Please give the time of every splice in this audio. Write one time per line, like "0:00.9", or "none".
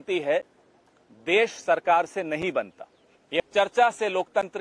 0:03.4